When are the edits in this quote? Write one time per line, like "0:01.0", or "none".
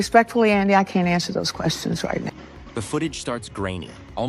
0:01.1

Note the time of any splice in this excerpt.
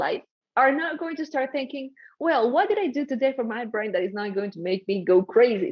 none

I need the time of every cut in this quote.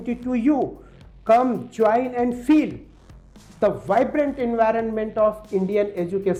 none

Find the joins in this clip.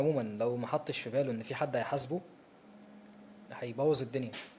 none

